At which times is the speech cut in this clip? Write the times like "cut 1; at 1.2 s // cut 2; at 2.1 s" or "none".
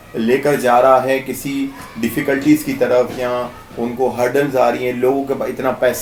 none